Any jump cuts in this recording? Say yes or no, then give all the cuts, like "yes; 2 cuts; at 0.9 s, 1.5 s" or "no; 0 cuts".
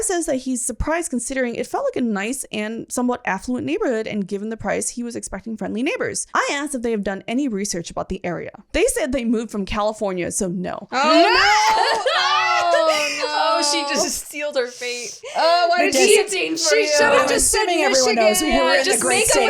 yes; 3 cuts; at 2.8 s, 6.2 s, 8.7 s